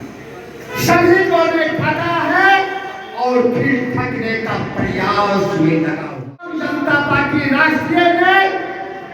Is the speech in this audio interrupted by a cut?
yes; 1 cut; at 6.5 s

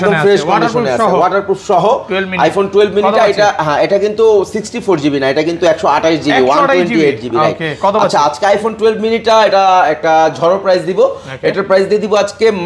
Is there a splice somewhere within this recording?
no; 0 cuts

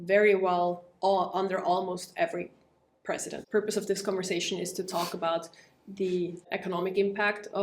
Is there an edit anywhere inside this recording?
yes; 2 cuts; at 3.3 s, 6.5 s

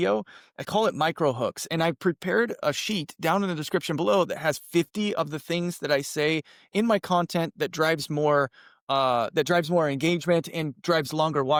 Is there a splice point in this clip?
no; 0 cuts

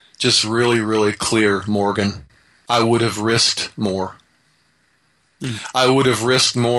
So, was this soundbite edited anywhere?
no; 0 cuts

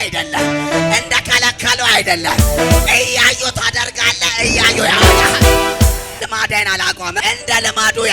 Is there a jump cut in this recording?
yes; 2 cuts; at 6.2 s, 7.2 s

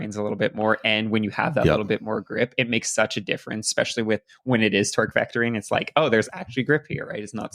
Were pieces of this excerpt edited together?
no; 0 cuts

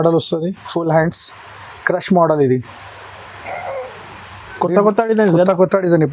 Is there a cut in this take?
no; 0 cuts

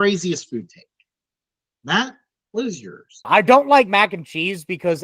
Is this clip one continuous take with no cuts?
no; 1 cut; at 3.3 s

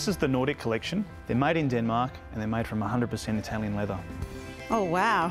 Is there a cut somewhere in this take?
yes; 2 cuts; at 1.2 s, 4.3 s

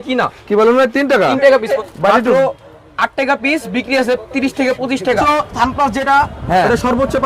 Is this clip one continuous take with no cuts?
no; 2 cuts; at 1.7 s, 5.2 s

